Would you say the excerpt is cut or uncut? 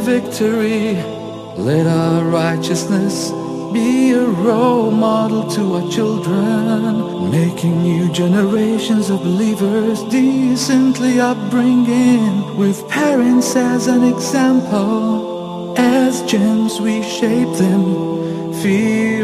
uncut